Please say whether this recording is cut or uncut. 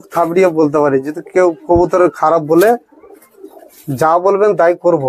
uncut